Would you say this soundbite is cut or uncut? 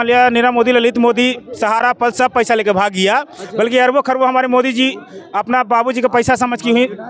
uncut